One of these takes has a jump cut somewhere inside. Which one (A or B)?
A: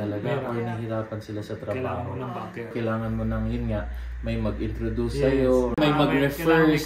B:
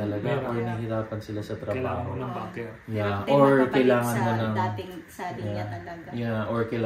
A